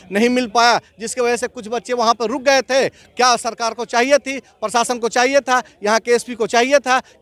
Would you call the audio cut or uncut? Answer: uncut